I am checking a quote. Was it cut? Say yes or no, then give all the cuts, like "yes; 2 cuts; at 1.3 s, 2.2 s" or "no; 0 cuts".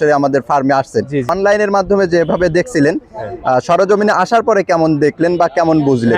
yes; 1 cut; at 1.3 s